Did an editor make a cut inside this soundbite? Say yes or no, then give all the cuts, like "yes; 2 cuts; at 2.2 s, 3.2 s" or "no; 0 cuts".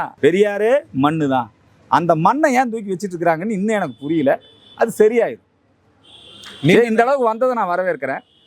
no; 0 cuts